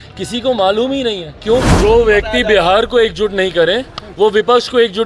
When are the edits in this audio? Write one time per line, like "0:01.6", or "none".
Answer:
0:01.8